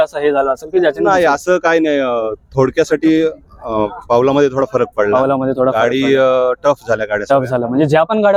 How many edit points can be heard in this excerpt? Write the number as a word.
zero